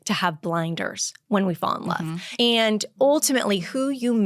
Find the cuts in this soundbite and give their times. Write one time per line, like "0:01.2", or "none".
0:02.2